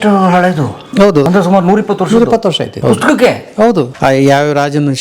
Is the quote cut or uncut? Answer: cut